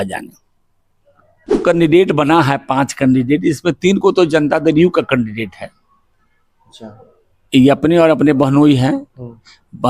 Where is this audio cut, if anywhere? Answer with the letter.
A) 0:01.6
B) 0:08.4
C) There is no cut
A